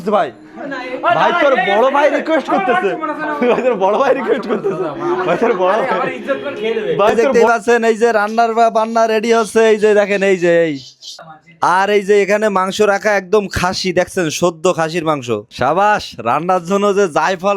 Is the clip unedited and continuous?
yes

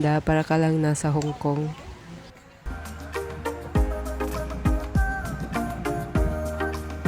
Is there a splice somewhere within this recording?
no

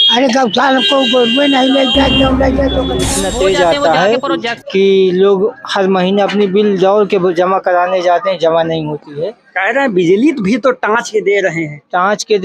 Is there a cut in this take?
yes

